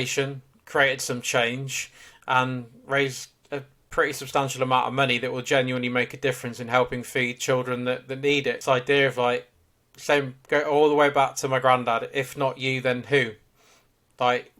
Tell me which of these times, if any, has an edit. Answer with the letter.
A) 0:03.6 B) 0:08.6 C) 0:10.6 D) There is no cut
B